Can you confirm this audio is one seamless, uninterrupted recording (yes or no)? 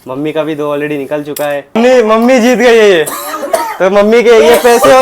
no